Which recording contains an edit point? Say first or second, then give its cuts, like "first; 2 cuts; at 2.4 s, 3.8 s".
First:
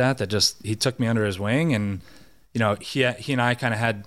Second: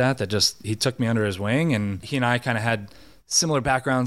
second; 1 cut; at 2.0 s